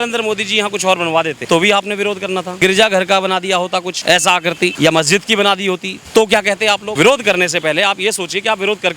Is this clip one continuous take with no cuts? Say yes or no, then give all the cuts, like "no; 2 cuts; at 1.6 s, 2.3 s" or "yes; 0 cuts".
no; 6 cuts; at 1.4 s, 2.5 s, 3.9 s, 4.7 s, 5.9 s, 6.9 s